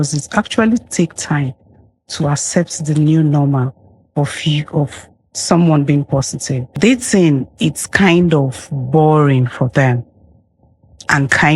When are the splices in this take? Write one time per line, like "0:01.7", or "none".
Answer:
0:06.7